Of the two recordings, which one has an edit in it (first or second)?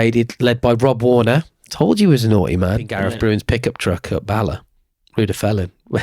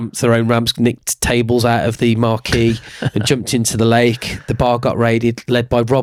first